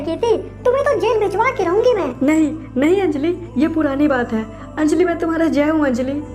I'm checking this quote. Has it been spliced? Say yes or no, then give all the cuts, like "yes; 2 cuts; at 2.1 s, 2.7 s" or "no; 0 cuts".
yes; 1 cut; at 2.1 s